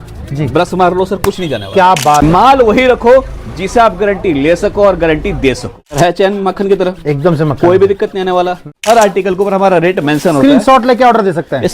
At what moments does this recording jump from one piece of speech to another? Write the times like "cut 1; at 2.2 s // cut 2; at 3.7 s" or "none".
cut 1; at 2.2 s // cut 2; at 6.0 s // cut 3; at 8.8 s